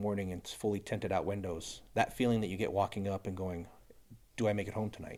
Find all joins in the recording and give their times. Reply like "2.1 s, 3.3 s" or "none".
none